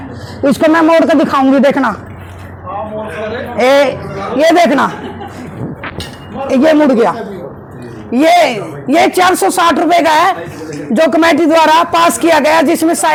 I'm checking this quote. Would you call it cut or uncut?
uncut